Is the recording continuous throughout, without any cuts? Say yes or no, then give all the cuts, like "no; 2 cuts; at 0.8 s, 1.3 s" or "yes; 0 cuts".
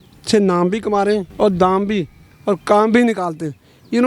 no; 1 cut; at 1.3 s